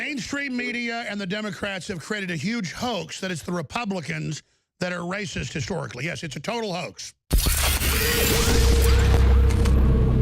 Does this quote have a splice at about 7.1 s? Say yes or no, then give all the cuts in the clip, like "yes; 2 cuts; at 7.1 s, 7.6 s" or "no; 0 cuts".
yes; 1 cut; at 7.1 s